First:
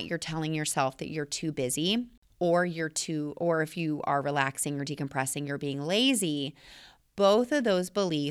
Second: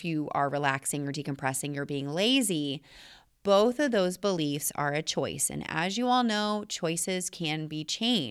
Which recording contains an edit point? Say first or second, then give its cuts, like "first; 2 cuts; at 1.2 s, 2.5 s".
first; 1 cut; at 2.2 s